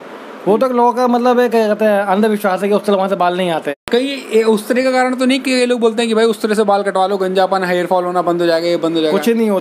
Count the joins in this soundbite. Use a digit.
1